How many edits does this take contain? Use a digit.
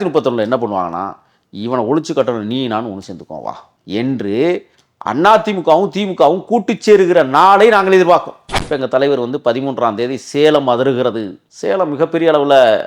1